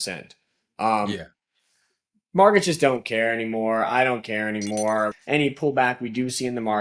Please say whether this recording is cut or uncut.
cut